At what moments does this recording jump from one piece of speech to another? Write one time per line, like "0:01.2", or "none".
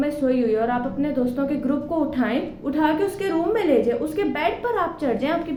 none

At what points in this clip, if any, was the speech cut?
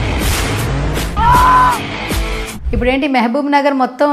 0:01.1
0:02.5

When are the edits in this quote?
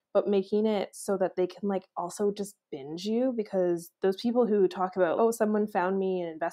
0:05.2

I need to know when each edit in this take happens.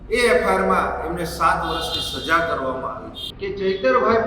0:03.2

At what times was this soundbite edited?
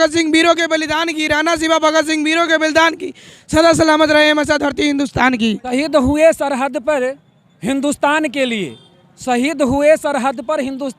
0:05.6

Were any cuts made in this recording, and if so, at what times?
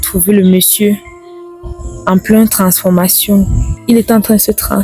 0:03.7

